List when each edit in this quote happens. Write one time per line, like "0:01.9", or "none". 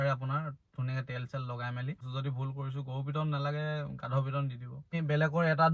0:02.0
0:04.8